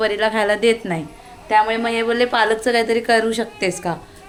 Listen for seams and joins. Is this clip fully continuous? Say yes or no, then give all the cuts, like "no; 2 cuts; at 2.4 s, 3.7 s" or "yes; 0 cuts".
yes; 0 cuts